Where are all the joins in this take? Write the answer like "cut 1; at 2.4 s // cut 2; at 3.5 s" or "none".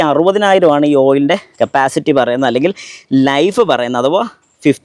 none